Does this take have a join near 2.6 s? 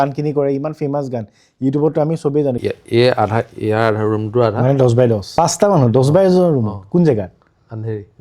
yes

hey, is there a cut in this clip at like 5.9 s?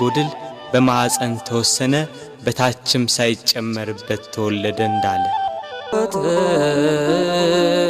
yes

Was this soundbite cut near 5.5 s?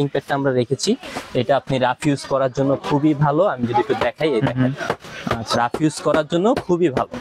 no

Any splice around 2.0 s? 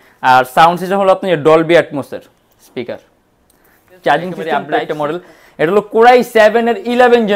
no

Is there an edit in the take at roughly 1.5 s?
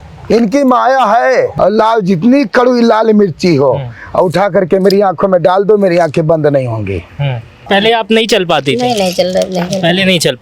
yes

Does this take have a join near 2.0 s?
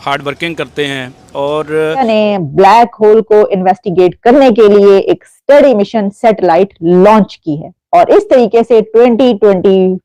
yes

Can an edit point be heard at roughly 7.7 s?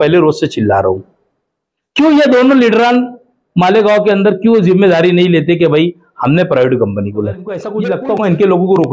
yes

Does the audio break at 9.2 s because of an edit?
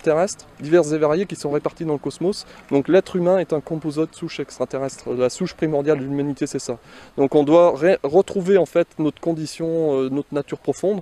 yes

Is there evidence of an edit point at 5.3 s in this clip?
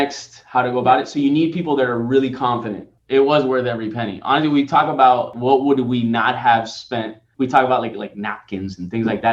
yes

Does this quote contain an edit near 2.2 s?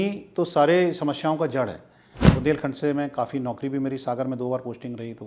yes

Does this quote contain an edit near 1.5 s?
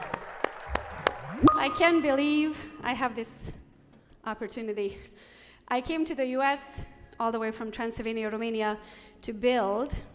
yes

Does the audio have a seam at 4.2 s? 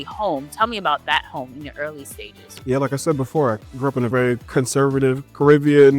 yes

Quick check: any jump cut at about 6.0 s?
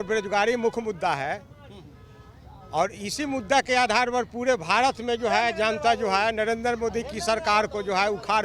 no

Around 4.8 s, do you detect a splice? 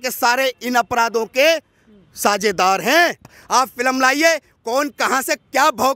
no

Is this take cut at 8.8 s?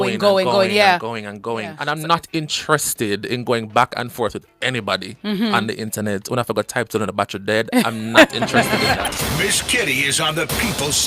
yes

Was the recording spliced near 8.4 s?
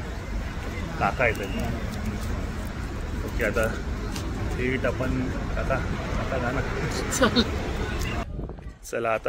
yes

